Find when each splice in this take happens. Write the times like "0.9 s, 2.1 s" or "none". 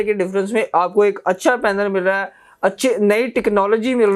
none